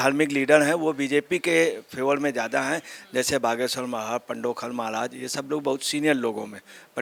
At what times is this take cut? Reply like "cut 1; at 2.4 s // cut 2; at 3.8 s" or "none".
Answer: none